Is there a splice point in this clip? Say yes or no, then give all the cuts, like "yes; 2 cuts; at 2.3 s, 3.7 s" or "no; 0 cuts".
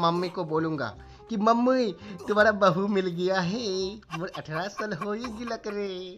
no; 0 cuts